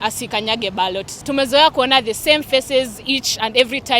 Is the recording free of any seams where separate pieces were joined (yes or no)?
no